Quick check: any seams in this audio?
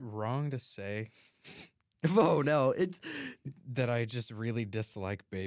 no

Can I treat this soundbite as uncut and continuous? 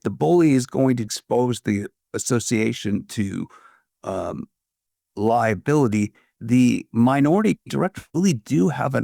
no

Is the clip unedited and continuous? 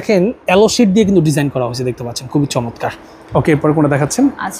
yes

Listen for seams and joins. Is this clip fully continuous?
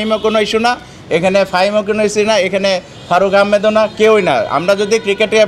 yes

